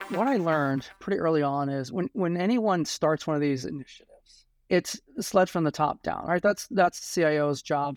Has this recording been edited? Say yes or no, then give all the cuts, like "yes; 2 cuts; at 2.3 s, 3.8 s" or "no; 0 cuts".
no; 0 cuts